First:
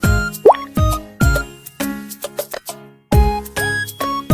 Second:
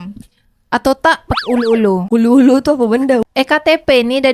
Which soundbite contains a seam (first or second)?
second